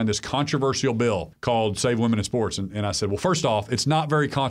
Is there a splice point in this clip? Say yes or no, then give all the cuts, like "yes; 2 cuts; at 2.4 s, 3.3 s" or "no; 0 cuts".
yes; 1 cut; at 1.3 s